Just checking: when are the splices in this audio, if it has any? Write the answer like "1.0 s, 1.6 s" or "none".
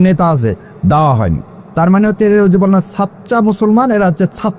none